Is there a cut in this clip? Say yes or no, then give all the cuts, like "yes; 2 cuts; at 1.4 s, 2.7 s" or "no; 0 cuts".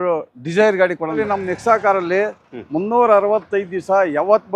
yes; 1 cut; at 1.2 s